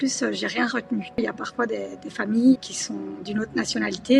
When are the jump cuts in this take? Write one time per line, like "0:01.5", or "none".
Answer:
0:01.2
0:02.7